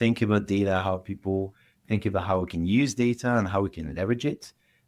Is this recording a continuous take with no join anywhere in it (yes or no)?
yes